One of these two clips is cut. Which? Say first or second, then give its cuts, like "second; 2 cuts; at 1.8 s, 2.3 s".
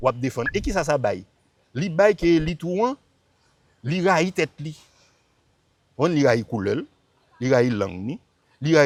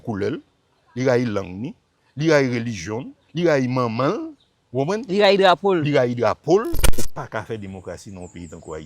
second; 1 cut; at 6.9 s